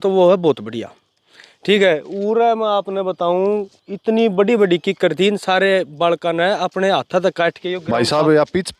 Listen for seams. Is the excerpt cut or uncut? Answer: cut